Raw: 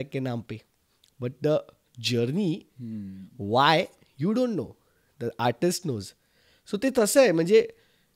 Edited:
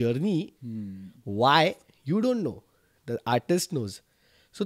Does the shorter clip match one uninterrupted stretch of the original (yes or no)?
yes